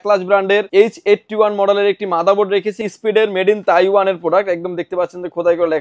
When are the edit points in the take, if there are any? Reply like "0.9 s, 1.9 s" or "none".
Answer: 2.7 s